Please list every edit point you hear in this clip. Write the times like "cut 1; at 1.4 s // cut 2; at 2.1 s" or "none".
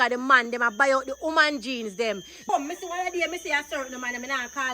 cut 1; at 2.3 s